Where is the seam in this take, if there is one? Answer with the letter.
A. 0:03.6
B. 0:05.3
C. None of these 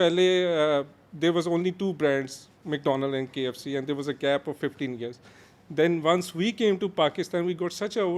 C